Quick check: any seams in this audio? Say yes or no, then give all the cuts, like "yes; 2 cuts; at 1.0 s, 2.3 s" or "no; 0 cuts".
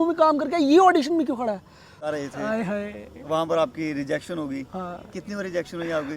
yes; 1 cut; at 2.1 s